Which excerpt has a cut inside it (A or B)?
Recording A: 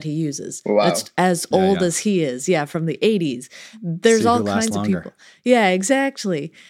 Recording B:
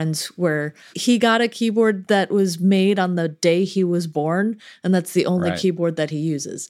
B